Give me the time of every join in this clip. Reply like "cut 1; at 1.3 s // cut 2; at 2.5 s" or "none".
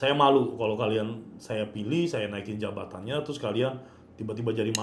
none